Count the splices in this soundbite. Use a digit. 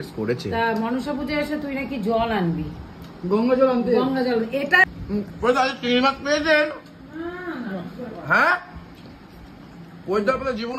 1